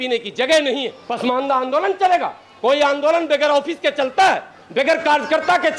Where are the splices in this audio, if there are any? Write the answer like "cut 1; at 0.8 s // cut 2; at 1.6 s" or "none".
cut 1; at 1.0 s